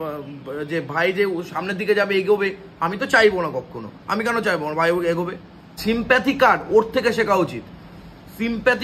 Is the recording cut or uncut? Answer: cut